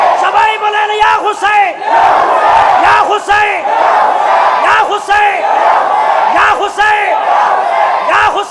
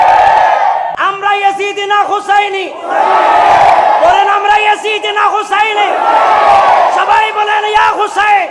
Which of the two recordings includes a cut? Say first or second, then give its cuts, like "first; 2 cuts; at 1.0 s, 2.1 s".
second; 1 cut; at 0.9 s